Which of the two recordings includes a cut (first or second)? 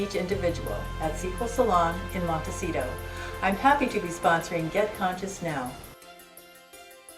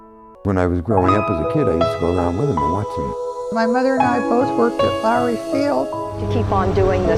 first